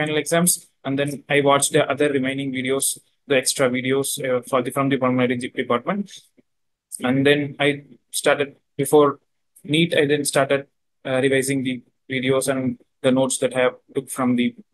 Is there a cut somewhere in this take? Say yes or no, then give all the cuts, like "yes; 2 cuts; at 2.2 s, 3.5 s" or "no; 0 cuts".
yes; 1 cut; at 4.5 s